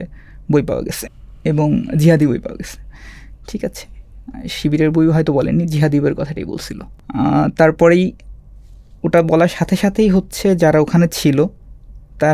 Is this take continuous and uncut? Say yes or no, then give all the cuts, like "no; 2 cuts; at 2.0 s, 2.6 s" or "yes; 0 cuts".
yes; 0 cuts